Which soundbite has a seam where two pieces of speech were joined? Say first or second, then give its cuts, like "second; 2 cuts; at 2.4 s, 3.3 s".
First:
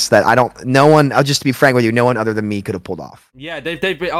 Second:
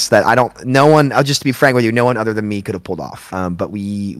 first; 1 cut; at 3.3 s